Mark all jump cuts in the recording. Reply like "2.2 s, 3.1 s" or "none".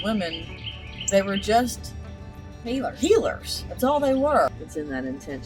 4.5 s